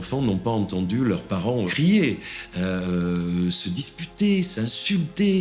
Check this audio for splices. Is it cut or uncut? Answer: uncut